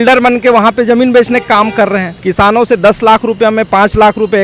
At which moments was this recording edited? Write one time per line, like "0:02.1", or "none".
0:02.1